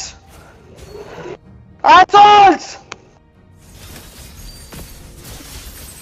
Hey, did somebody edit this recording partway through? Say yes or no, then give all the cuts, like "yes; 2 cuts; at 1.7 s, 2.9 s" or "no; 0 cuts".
no; 0 cuts